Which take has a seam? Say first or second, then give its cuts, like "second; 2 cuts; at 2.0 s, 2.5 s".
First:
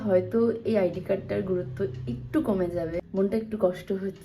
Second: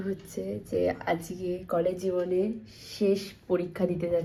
first; 1 cut; at 3.0 s